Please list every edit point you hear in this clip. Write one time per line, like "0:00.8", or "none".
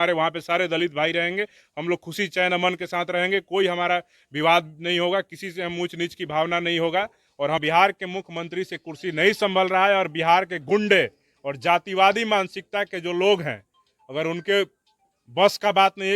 0:07.6